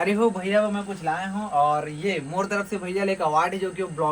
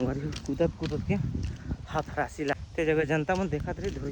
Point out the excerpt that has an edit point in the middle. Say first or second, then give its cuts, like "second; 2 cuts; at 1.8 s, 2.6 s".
second; 1 cut; at 2.5 s